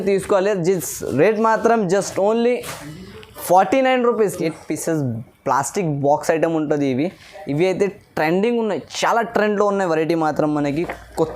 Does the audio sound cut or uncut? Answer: cut